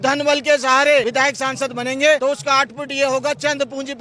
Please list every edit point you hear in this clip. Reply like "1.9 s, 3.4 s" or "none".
1.1 s, 2.2 s